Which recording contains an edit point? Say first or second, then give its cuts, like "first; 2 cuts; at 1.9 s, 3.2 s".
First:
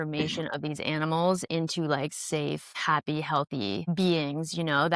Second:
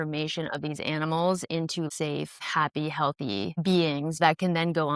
second; 2 cuts; at 1.9 s, 4.2 s